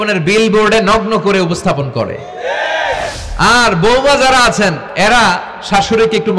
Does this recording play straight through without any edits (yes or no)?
no